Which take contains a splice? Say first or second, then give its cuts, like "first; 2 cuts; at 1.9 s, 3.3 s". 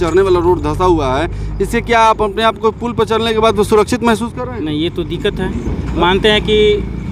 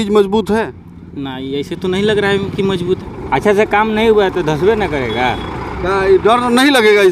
second; 1 cut; at 3.1 s